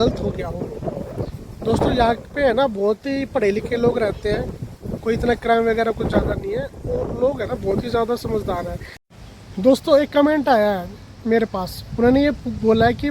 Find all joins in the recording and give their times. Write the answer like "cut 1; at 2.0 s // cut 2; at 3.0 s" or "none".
cut 1; at 9.0 s